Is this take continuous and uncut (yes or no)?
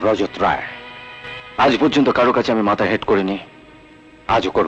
yes